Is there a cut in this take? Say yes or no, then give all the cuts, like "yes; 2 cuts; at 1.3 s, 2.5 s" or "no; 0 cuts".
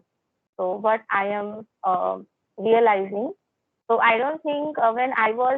no; 0 cuts